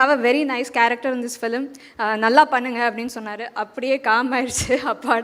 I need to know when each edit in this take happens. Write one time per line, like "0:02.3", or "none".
none